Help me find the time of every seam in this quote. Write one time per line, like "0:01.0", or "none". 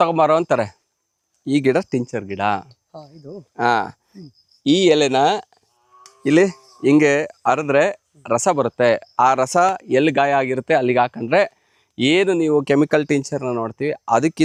none

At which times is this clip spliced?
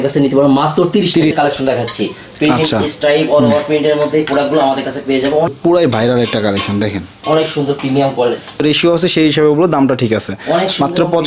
0:01.3
0:05.5
0:08.6

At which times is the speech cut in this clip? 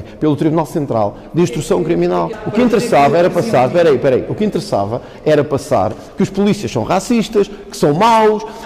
0:02.3

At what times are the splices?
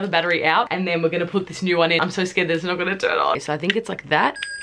0:02.0
0:03.4

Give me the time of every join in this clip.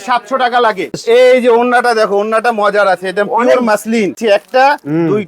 0:01.0
0:04.2

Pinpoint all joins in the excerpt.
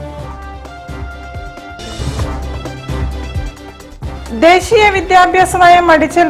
0:04.1

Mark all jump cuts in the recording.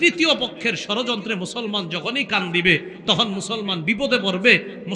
none

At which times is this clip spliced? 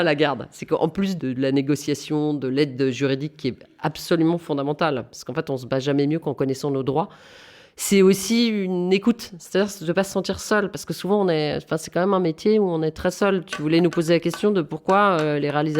0:01.1

